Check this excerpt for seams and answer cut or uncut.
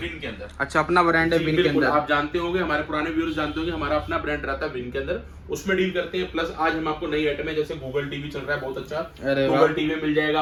uncut